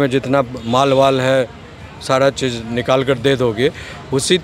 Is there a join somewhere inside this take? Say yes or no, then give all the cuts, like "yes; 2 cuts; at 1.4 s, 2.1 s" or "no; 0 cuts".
no; 0 cuts